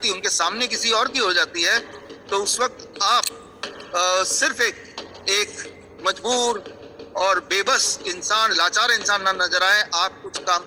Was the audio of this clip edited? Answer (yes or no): no